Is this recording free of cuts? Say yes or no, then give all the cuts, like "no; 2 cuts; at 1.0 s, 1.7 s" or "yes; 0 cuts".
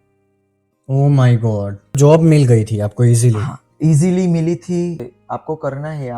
no; 2 cuts; at 1.9 s, 5.1 s